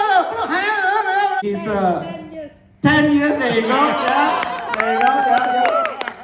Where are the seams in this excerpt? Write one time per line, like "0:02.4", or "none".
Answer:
0:01.4